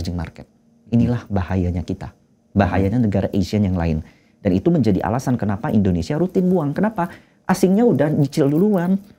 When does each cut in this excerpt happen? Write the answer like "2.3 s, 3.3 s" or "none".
none